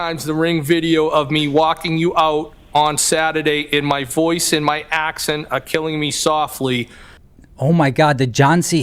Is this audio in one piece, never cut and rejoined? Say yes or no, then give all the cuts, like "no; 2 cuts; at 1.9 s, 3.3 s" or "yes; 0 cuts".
yes; 0 cuts